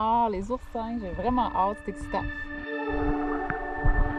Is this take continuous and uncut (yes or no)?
yes